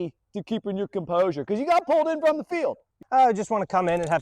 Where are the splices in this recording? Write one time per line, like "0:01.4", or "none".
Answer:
0:02.9